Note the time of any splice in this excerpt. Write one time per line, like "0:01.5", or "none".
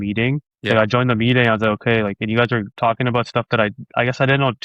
none